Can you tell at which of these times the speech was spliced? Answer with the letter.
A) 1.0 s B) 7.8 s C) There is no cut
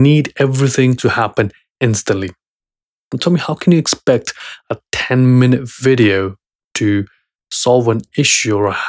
A